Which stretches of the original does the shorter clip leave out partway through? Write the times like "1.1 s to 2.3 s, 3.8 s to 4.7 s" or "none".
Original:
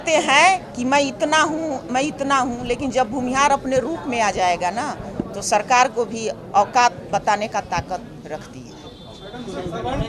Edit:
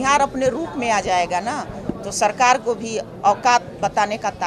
none